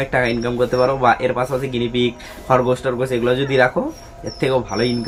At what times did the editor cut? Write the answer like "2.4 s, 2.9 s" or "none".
none